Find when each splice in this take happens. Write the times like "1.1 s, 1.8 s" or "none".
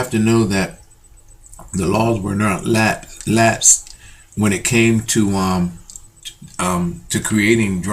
2.3 s